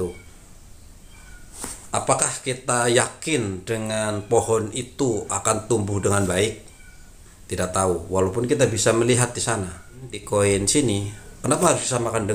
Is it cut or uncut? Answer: cut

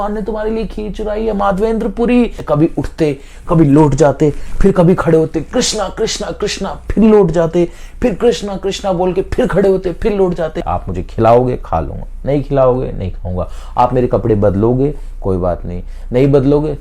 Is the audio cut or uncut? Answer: cut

